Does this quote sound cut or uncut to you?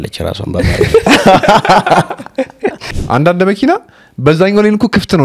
cut